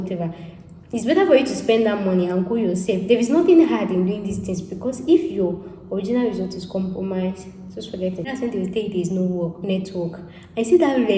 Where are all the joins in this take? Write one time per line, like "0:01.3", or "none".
0:08.3